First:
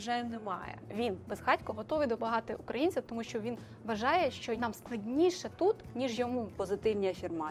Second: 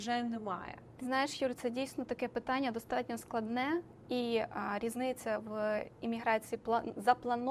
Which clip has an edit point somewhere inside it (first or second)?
first